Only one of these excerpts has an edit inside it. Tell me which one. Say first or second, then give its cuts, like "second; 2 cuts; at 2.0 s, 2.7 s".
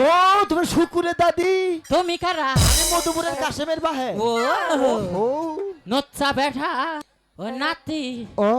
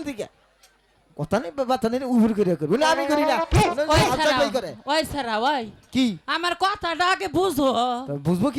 first; 1 cut; at 7.0 s